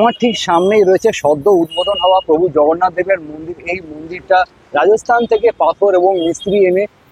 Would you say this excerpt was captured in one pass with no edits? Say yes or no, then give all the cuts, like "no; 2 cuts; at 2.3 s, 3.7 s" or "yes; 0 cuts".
yes; 0 cuts